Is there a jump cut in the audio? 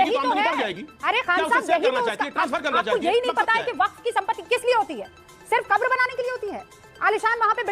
no; 0 cuts

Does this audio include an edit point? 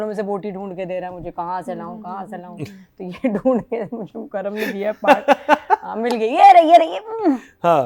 no; 0 cuts

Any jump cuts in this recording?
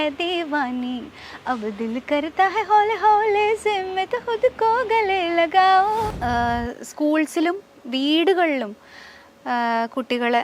yes; 1 cut; at 6.1 s

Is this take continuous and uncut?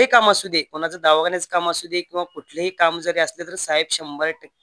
yes; 0 cuts

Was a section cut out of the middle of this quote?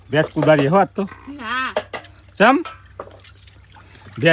no; 0 cuts

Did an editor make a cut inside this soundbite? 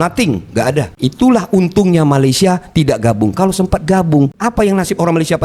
yes; 1 cut; at 0.9 s

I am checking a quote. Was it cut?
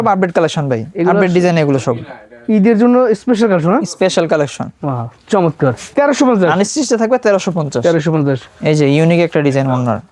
no; 0 cuts

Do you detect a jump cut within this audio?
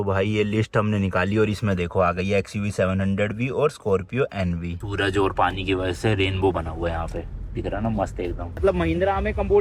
yes; 2 cuts; at 4.8 s, 8.6 s

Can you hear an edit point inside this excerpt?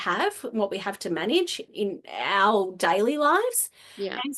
yes; 1 cut; at 1.6 s

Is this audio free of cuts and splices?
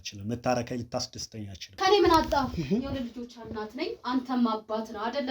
no; 1 cut; at 1.7 s

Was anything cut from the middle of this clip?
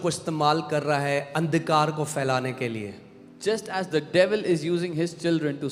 no; 0 cuts

